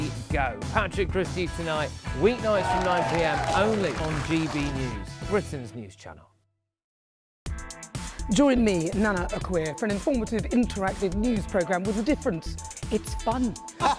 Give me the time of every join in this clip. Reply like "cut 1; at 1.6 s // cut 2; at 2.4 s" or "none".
cut 1; at 7.0 s